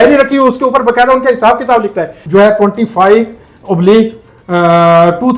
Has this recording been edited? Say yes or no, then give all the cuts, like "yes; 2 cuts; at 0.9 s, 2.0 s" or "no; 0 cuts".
yes; 1 cut; at 2.1 s